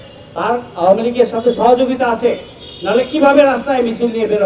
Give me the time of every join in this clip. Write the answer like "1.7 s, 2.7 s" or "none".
none

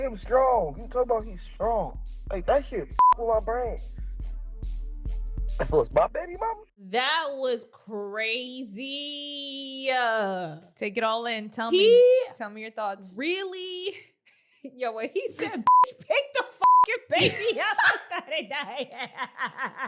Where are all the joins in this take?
6.6 s

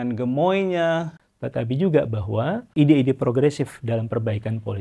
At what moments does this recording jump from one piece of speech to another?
1.2 s, 2.7 s

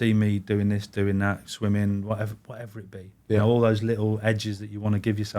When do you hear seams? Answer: none

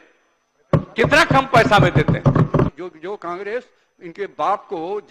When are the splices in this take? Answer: 2.7 s

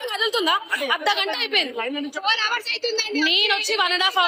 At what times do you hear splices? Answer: none

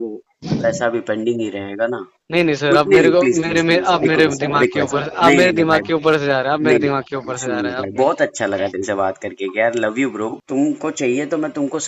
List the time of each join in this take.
2.1 s, 10.4 s

